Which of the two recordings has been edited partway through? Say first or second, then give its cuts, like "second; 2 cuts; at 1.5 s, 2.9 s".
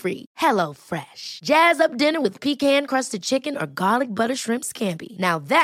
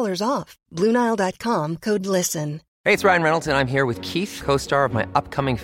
second; 1 cut; at 2.7 s